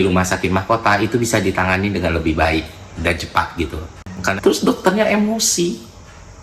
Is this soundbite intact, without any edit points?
no; 1 cut; at 4.1 s

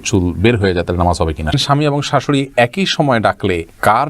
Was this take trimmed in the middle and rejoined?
yes; 1 cut; at 1.6 s

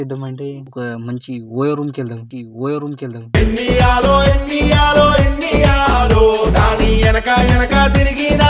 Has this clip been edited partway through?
no; 0 cuts

